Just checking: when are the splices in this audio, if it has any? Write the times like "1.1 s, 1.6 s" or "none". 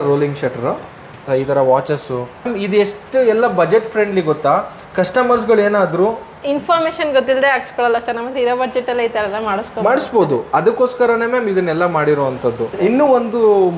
1.3 s, 2.5 s, 12.7 s